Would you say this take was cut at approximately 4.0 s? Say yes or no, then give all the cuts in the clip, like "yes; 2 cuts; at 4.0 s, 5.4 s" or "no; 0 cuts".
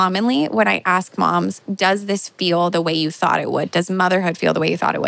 no; 1 cut; at 1.6 s